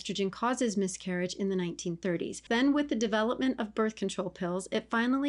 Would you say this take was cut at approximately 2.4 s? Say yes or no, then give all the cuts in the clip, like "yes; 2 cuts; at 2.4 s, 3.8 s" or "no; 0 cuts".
yes; 1 cut; at 2.4 s